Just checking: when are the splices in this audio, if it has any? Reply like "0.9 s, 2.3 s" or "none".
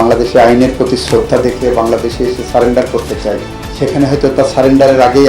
3.6 s